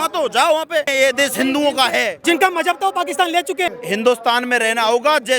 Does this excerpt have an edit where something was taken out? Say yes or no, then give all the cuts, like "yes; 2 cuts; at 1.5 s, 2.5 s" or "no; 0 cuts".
yes; 3 cuts; at 0.9 s, 2.2 s, 3.8 s